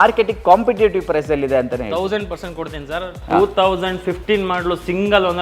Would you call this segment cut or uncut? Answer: uncut